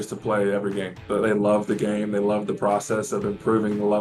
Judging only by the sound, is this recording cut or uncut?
cut